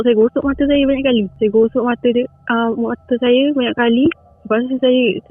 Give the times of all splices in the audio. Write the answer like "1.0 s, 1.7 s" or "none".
1.3 s, 4.3 s